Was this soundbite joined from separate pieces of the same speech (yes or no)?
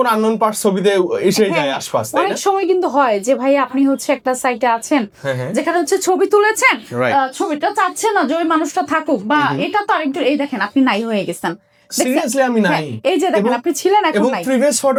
no